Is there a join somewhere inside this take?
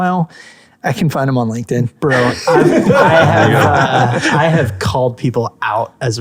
no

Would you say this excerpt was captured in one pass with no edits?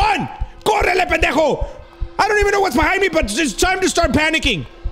yes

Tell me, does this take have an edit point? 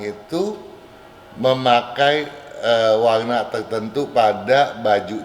no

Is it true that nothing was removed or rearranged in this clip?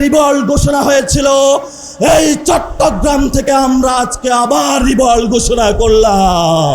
yes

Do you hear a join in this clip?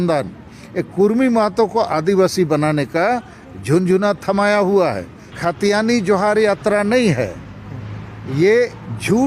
yes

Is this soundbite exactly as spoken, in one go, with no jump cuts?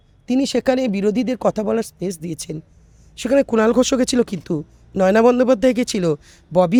yes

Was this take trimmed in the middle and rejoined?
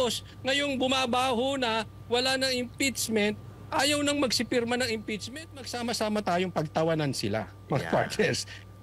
yes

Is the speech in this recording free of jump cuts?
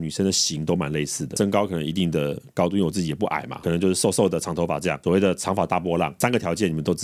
yes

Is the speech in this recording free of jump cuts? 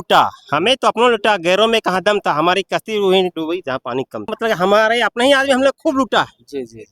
no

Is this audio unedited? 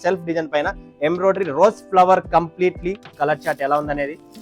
no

